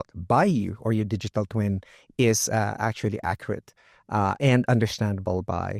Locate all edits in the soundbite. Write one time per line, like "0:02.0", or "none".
none